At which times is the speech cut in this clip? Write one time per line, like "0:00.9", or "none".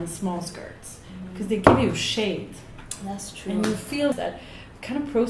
0:04.1